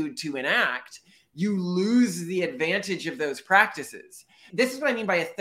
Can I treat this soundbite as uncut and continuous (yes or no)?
no